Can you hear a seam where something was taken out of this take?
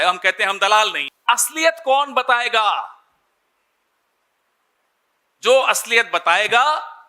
yes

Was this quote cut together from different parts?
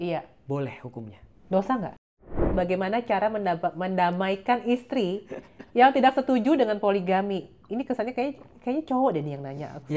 yes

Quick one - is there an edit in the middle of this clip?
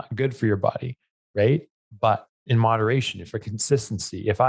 yes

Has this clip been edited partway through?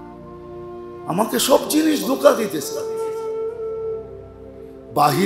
yes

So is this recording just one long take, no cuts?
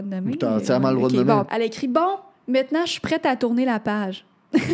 no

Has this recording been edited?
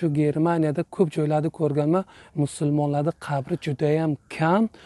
no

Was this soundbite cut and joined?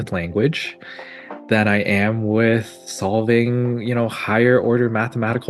no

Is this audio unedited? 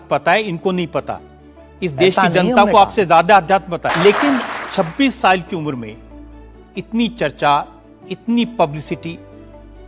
no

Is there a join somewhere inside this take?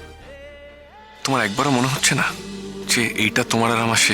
yes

